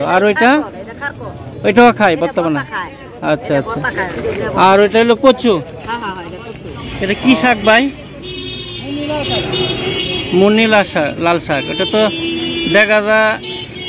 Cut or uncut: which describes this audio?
cut